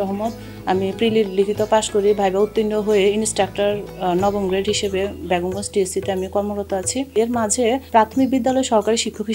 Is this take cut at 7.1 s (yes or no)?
yes